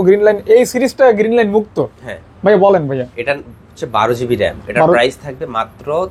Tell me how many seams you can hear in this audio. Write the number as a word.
zero